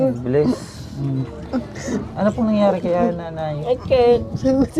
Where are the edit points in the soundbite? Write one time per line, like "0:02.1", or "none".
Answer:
0:02.1